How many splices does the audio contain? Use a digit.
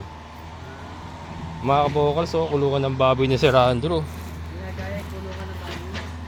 0